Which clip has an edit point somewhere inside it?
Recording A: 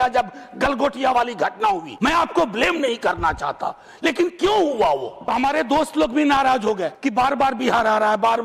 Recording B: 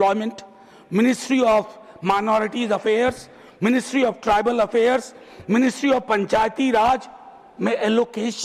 A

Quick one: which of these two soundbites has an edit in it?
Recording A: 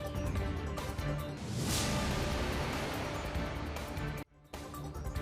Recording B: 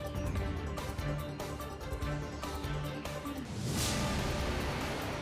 B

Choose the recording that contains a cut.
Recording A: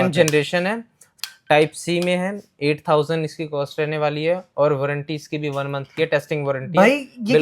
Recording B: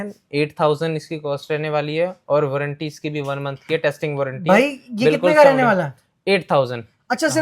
A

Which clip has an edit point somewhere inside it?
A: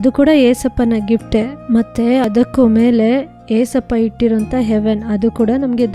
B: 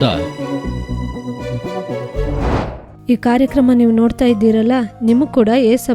B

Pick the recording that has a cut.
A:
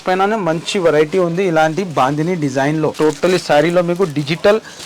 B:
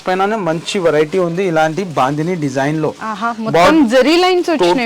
A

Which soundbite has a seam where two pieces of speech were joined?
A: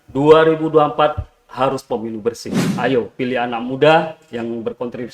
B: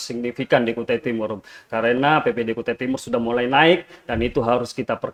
A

